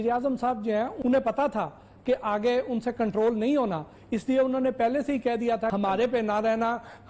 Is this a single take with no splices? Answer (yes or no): no